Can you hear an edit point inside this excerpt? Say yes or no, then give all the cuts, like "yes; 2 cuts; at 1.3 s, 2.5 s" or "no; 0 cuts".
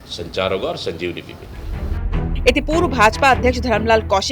no; 0 cuts